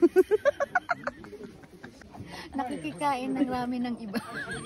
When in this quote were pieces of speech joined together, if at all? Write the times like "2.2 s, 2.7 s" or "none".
1.9 s